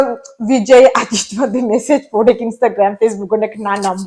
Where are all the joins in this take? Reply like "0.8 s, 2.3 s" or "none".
none